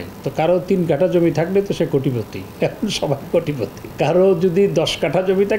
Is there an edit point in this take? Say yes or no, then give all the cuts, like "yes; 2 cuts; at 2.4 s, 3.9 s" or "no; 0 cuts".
yes; 2 cuts; at 2.4 s, 3.8 s